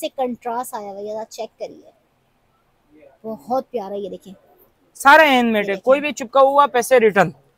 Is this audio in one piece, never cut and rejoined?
yes; 0 cuts

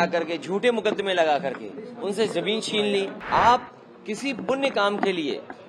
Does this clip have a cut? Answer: yes; 1 cut; at 3.2 s

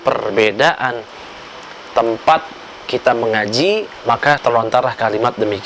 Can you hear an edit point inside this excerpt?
no; 0 cuts

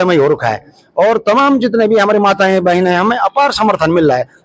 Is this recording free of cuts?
yes; 0 cuts

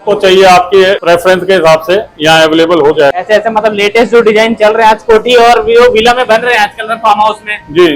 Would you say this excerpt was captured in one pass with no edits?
yes; 0 cuts

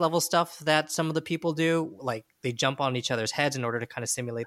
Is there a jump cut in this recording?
no; 0 cuts

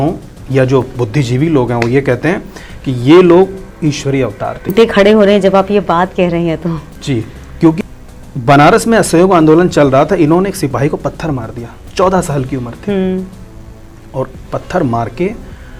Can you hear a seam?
yes; 2 cuts; at 4.7 s, 7.8 s

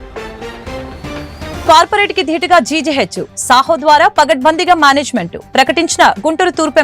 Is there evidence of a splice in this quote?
yes; 1 cut; at 1.5 s

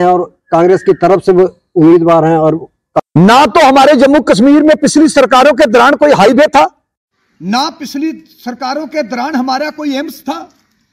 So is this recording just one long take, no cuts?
no; 1 cut; at 3.0 s

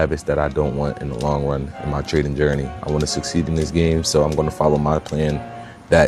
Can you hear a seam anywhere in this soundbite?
no; 0 cuts

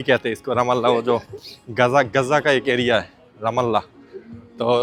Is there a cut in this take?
no; 0 cuts

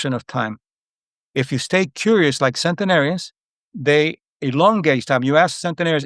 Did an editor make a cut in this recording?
no; 0 cuts

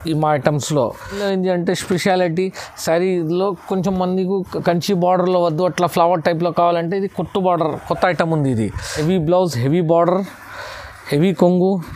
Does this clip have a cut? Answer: yes; 2 cuts; at 1.2 s, 8.9 s

